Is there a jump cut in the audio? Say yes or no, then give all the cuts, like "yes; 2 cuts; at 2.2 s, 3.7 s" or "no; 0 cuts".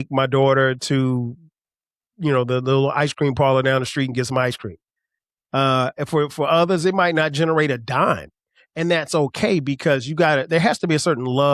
no; 0 cuts